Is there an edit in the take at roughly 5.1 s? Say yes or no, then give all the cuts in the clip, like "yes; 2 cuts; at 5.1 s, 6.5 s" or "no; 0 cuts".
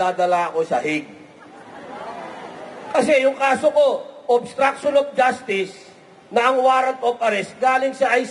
no; 0 cuts